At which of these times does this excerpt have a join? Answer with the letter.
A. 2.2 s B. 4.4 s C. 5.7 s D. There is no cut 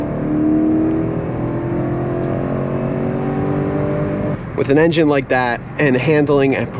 B